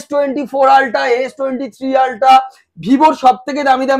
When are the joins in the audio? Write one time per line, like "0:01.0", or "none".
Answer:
none